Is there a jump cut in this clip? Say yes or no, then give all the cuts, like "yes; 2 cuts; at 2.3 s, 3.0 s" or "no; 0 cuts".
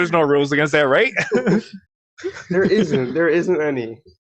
no; 0 cuts